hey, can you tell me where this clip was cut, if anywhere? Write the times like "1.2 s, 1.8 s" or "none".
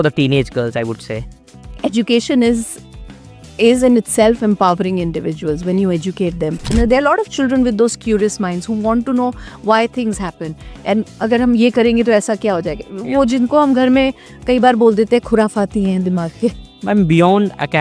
6.6 s, 16.7 s